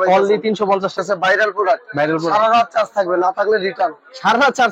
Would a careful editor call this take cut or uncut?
cut